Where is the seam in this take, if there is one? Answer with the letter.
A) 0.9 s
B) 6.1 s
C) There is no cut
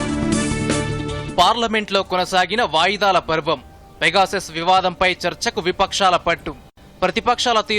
A